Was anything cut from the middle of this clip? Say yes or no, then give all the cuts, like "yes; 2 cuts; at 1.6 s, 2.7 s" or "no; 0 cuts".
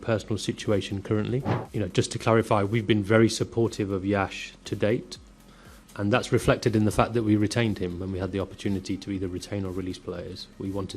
no; 0 cuts